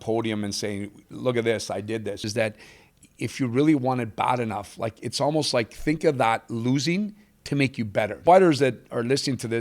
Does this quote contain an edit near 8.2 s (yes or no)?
yes